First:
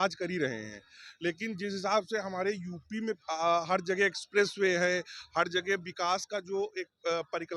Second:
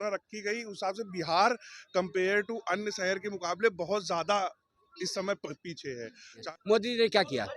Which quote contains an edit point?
second; 1 cut; at 6.4 s

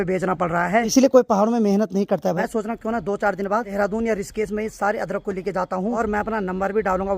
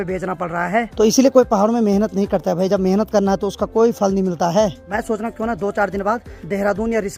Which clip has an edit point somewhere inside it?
first; 4 cuts; at 0.9 s, 2.4 s, 3.7 s, 6.0 s

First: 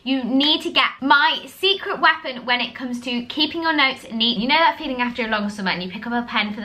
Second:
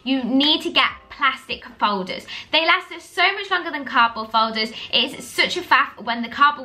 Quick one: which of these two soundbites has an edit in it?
first; 2 cuts; at 1.0 s, 4.4 s

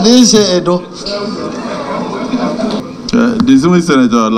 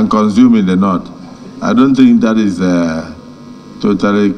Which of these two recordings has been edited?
first; 1 cut; at 2.8 s

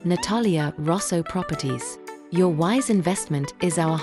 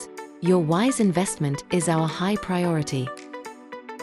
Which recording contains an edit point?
second; 1 cut; at 3.1 s

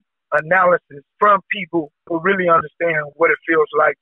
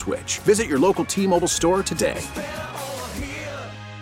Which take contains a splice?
first; 2 cuts; at 1.0 s, 2.0 s

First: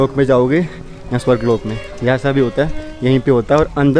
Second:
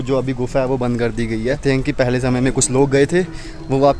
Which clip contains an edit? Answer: second; 1 cut; at 1.6 s

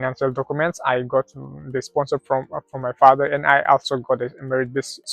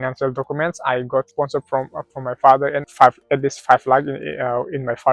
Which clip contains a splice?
second; 2 cuts; at 1.3 s, 2.8 s

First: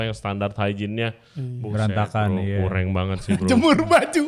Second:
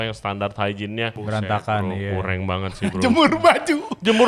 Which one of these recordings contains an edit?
second; 1 cut; at 1.2 s

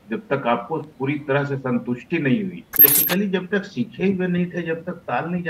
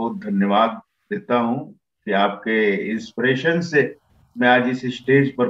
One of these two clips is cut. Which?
first; 1 cut; at 2.7 s

